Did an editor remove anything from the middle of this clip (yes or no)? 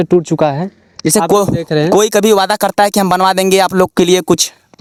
no